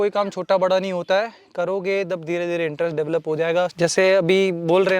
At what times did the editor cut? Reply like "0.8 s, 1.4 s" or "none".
3.7 s

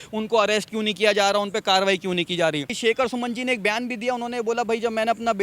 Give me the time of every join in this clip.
2.7 s

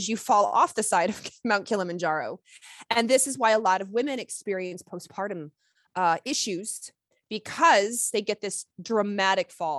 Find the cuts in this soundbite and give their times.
none

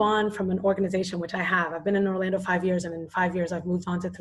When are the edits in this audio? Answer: none

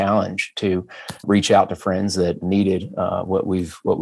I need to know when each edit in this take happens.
1.2 s, 2.4 s

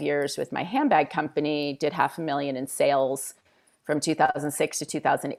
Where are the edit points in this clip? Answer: none

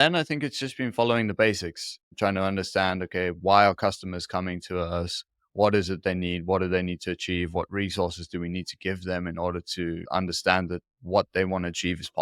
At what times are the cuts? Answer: 10.0 s

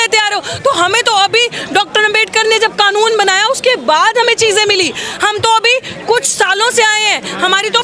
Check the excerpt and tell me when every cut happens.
none

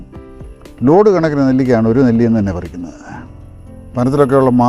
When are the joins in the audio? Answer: none

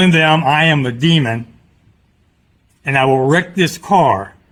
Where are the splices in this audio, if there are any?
none

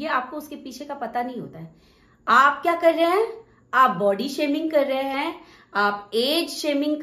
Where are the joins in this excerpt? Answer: none

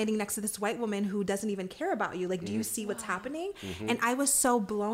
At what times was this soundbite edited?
none

